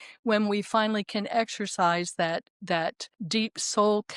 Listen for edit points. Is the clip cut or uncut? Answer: cut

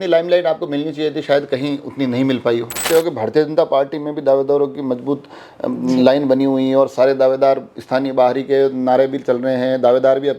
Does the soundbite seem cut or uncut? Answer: cut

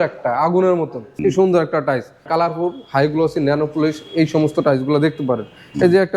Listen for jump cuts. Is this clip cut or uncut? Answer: cut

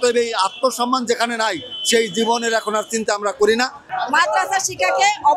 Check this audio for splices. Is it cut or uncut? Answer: cut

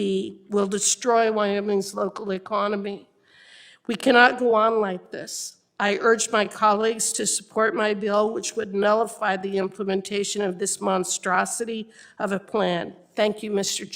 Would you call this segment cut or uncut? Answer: uncut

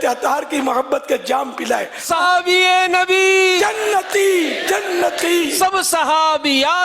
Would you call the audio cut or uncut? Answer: cut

